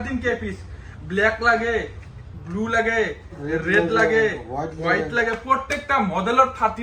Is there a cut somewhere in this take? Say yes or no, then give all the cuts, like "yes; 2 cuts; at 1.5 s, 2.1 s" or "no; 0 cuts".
no; 0 cuts